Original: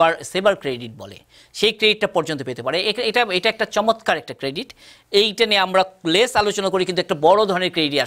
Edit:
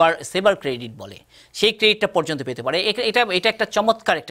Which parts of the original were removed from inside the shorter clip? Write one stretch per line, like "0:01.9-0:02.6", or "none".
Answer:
none